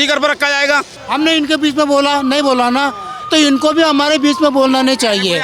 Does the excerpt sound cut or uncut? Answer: cut